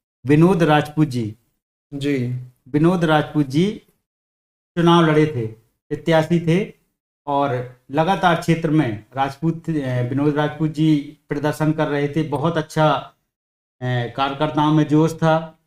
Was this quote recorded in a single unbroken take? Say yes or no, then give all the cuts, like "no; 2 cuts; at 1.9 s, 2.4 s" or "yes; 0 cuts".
yes; 0 cuts